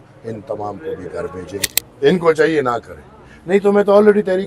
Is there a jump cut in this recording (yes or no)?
yes